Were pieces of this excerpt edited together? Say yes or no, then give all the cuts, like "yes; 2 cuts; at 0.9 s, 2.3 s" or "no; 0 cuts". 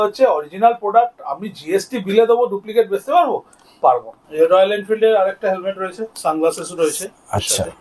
no; 0 cuts